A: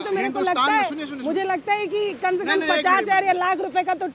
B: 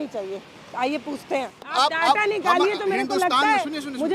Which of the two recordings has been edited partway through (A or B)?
B